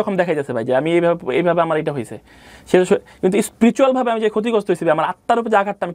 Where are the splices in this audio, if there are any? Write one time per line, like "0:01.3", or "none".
none

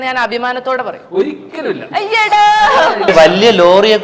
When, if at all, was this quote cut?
0:03.1

